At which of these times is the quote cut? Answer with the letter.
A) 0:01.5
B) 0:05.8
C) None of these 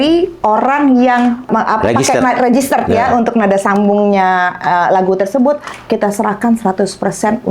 A